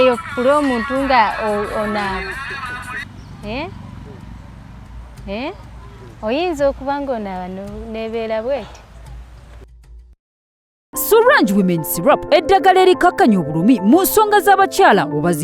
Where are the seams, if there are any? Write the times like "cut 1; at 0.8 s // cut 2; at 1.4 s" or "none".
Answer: cut 1; at 10.3 s